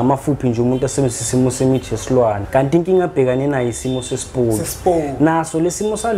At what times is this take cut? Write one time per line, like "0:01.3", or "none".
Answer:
0:02.4